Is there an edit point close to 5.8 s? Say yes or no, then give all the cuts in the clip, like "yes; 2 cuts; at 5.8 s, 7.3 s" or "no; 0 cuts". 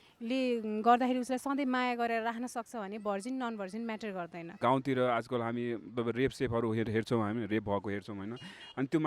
no; 1 cut; at 4.6 s